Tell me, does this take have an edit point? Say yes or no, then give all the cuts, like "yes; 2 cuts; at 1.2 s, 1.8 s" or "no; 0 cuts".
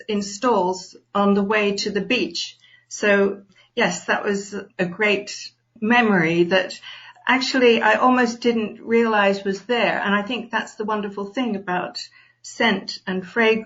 no; 0 cuts